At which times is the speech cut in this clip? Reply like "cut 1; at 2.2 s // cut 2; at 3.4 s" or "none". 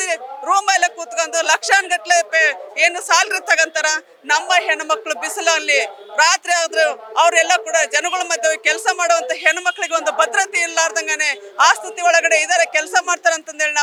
none